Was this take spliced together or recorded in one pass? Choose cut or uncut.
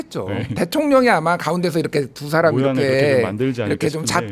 uncut